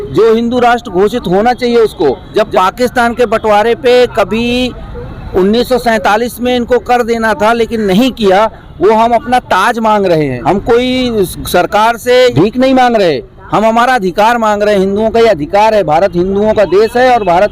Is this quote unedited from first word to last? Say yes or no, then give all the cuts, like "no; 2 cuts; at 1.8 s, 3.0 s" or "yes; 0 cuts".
no; 3 cuts; at 2.2 s, 10.4 s, 12.3 s